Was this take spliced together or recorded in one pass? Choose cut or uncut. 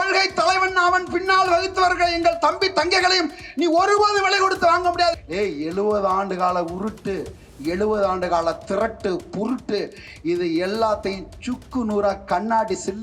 cut